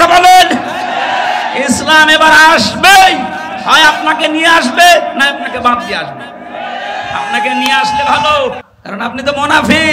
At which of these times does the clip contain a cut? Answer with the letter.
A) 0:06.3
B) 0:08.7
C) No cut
B